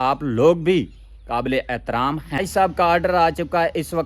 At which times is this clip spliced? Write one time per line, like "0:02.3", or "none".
0:02.4